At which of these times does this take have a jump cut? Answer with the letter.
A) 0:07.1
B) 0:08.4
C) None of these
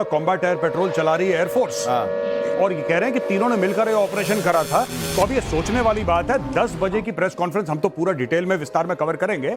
B